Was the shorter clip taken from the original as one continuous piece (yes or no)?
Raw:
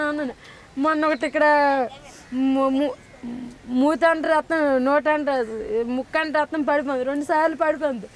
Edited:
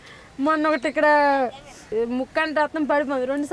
no